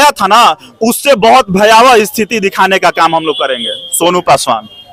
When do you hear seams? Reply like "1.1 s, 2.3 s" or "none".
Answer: none